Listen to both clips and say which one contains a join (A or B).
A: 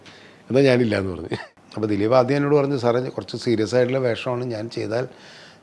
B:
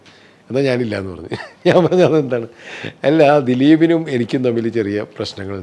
A